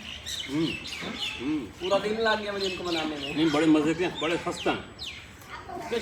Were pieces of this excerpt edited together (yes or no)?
no